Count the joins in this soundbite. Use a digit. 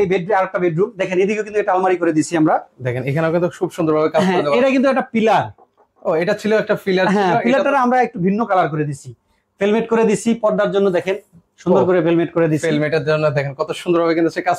0